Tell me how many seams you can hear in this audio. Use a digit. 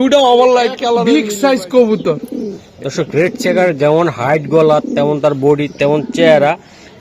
1